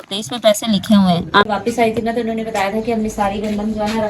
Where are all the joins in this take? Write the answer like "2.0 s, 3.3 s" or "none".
1.4 s